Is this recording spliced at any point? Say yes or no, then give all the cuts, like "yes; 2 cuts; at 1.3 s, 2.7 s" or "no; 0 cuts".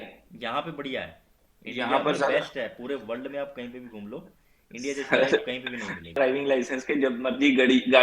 yes; 1 cut; at 6.2 s